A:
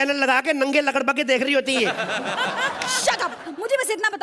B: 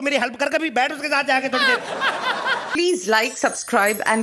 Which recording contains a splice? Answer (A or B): B